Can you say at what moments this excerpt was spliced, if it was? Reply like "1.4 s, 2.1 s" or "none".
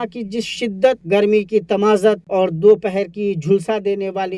1.0 s, 2.2 s